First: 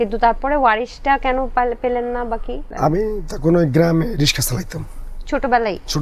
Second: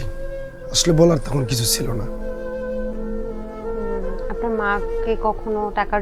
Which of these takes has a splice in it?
first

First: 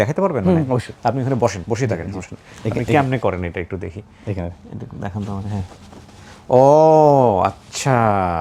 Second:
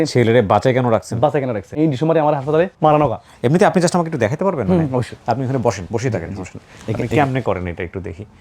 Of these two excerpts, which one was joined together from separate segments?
second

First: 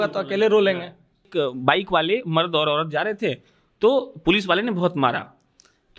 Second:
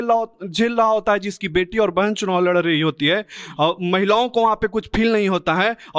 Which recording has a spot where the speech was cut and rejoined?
first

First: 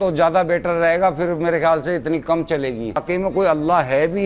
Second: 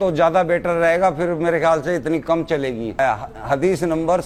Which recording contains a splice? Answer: first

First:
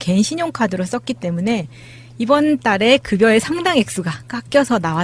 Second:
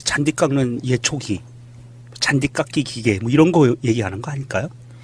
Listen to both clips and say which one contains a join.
second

